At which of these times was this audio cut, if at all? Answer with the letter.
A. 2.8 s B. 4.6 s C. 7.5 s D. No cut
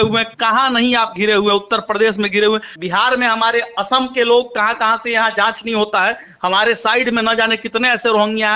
A